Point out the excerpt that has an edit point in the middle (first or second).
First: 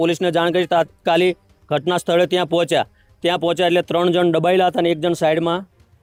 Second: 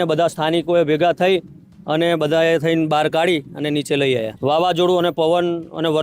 second